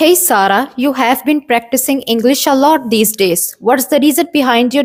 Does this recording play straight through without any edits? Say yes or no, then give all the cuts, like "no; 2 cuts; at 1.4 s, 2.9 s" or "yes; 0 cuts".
yes; 0 cuts